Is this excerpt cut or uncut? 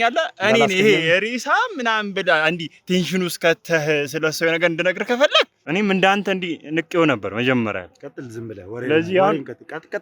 cut